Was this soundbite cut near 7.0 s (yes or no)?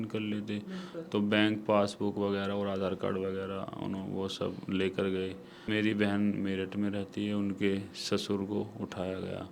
no